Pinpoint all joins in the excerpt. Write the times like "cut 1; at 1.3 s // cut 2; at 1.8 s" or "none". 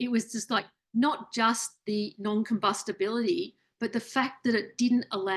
none